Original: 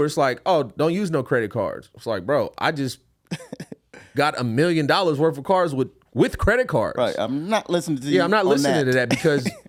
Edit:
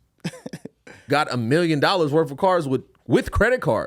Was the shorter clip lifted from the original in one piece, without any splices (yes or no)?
yes